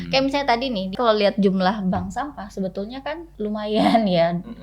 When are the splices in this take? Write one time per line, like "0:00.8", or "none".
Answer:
0:00.9
0:03.3